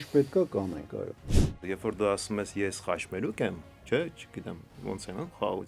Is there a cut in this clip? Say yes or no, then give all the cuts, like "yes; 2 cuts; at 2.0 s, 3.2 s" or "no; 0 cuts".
yes; 2 cuts; at 1.6 s, 4.7 s